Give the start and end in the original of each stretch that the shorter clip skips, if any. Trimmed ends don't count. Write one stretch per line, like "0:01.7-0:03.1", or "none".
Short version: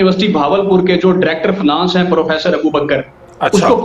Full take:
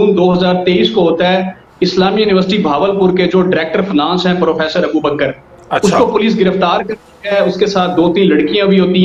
none